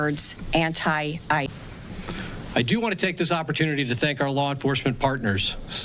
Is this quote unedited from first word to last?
no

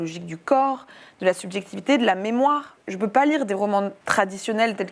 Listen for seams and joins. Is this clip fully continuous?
no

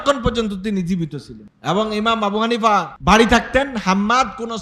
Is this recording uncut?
no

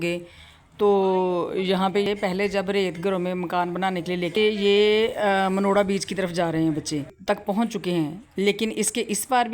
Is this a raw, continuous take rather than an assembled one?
no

